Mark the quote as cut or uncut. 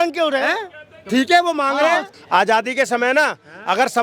cut